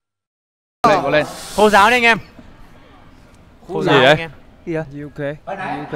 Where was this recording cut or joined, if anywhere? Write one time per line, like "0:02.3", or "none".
none